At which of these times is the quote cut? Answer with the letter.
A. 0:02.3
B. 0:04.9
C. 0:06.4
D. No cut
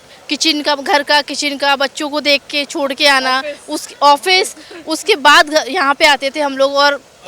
D